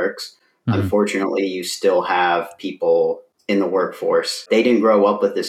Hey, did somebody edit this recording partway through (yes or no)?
yes